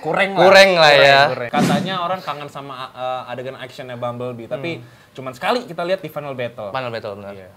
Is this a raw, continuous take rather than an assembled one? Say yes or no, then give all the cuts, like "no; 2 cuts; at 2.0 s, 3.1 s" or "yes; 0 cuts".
no; 1 cut; at 1.4 s